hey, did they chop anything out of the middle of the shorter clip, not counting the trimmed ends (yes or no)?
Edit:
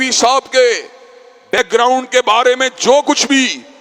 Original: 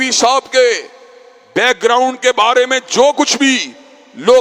yes